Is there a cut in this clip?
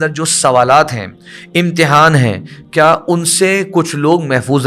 no; 0 cuts

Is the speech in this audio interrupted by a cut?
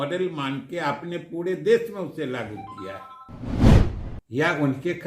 yes; 2 cuts; at 3.4 s, 4.0 s

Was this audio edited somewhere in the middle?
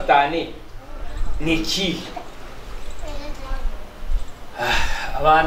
no; 0 cuts

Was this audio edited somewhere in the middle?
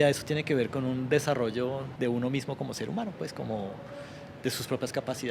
yes; 1 cut; at 1.9 s

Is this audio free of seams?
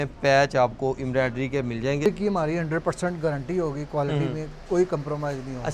no; 1 cut; at 2.0 s

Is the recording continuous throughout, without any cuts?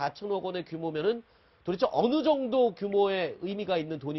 yes; 0 cuts

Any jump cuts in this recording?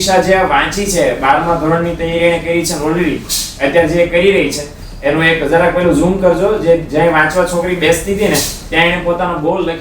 no; 0 cuts

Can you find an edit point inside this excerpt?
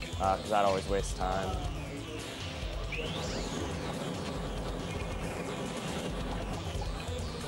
no; 0 cuts

